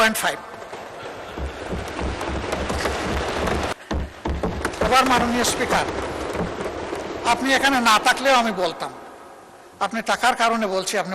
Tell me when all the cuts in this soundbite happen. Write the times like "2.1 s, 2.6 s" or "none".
3.7 s